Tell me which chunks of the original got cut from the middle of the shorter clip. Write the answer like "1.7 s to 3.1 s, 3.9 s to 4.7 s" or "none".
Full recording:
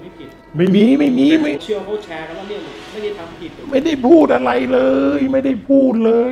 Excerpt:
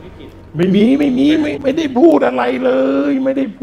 1.2 s to 3.3 s